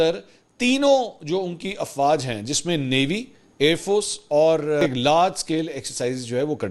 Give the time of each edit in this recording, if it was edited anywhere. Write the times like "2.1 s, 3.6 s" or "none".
4.8 s

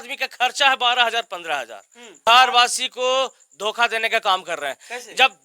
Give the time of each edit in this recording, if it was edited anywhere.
2.3 s

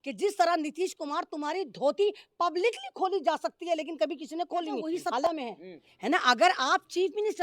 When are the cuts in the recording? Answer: 5.3 s

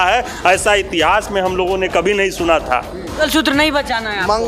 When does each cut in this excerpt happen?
3.1 s

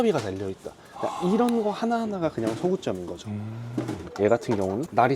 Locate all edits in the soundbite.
4.0 s

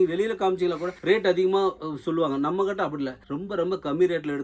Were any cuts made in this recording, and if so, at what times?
none

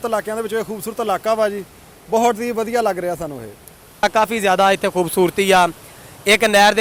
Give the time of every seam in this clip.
4.0 s

